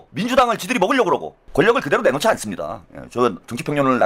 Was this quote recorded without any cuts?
yes; 0 cuts

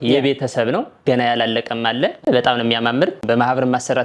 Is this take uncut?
no; 1 cut; at 2.3 s

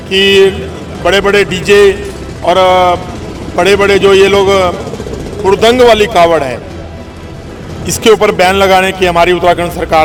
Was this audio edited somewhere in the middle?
no; 0 cuts

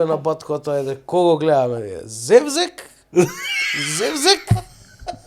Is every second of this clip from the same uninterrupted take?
yes; 0 cuts

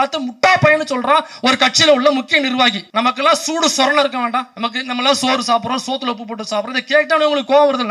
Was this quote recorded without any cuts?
no; 2 cuts; at 2.8 s, 4.5 s

